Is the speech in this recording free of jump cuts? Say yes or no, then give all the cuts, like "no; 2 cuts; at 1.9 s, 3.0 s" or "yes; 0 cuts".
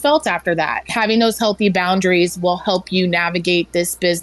no; 1 cut; at 0.9 s